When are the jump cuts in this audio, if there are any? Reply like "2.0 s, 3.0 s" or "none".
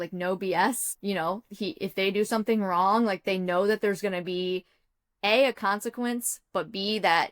0.9 s